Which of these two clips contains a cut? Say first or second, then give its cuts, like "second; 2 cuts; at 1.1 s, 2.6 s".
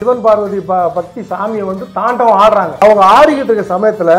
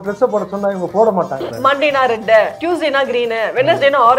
second; 2 cuts; at 1.5 s, 2.6 s